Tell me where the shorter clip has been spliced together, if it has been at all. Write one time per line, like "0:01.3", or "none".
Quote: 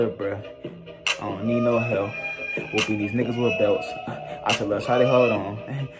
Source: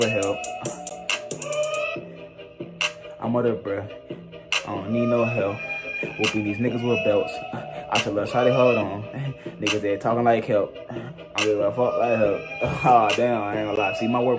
none